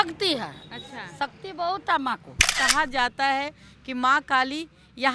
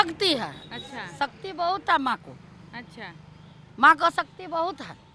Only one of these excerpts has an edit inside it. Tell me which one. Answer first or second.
first